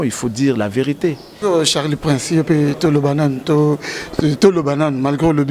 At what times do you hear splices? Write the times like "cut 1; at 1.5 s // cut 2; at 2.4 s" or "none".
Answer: cut 1; at 1.3 s